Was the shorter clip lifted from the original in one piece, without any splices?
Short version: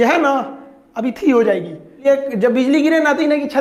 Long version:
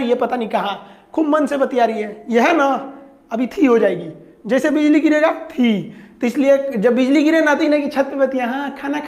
no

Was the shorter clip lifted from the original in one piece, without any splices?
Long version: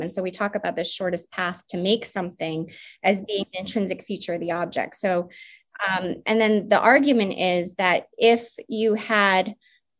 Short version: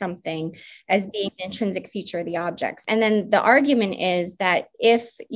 no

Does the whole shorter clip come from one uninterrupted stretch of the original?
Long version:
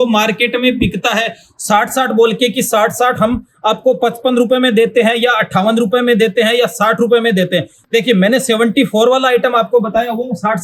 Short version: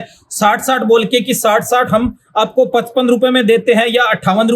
yes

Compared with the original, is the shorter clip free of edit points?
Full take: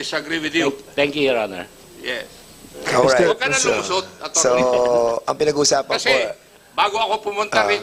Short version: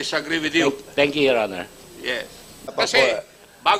no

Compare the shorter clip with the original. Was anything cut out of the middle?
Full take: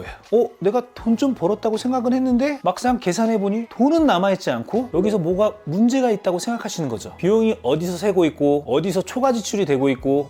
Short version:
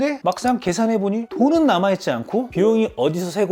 yes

